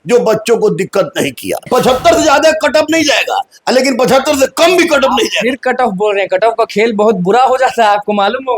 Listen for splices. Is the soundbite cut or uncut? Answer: cut